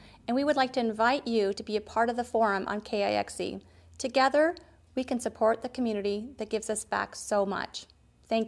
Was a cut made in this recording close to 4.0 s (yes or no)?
no